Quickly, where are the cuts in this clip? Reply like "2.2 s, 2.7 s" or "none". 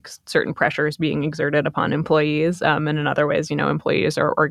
none